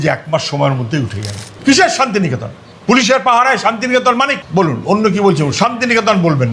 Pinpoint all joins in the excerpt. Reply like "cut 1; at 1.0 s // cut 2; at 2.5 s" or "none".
cut 1; at 1.5 s